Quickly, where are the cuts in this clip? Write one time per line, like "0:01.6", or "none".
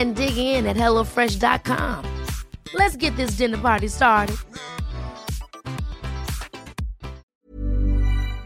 0:07.3